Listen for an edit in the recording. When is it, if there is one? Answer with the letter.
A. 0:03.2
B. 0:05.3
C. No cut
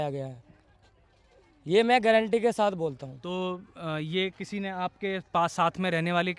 C